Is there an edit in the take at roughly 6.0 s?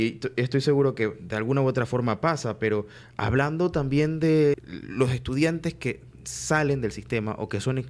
no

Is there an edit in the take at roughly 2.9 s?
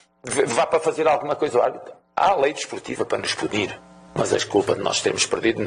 no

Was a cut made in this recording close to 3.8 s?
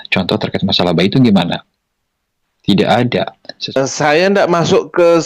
yes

